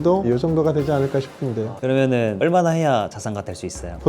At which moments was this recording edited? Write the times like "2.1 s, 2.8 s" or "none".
1.7 s

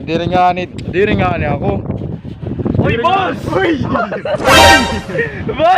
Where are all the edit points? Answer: none

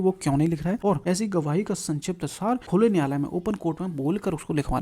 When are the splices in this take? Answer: 0.9 s, 2.6 s

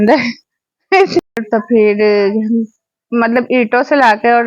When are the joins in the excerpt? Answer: 1.3 s

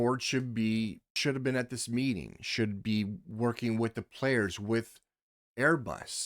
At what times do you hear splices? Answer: 1.1 s

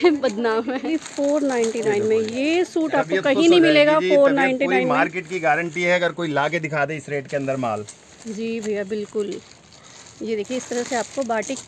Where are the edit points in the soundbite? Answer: 1.0 s

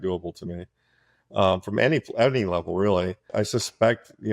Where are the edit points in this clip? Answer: 3.3 s

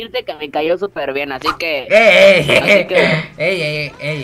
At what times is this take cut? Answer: none

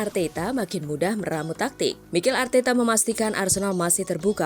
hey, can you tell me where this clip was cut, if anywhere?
2.0 s

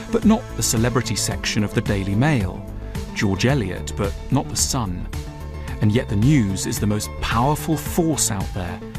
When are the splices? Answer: 7.8 s

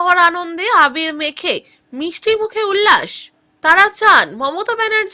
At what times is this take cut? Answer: none

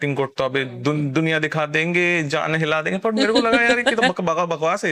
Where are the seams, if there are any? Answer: none

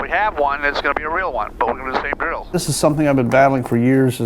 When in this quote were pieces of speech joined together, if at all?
2.5 s

